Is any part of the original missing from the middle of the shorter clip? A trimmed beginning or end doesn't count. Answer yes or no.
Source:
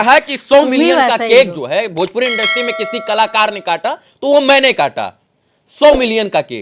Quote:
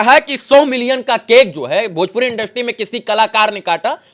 no